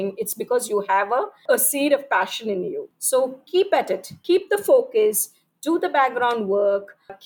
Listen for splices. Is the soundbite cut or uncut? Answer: cut